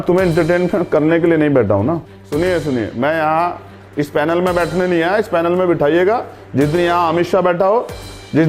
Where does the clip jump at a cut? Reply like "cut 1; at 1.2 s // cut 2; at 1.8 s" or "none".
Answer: cut 1; at 2.0 s